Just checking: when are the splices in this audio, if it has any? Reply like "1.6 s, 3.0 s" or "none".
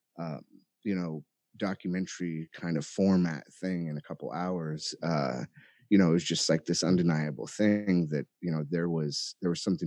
none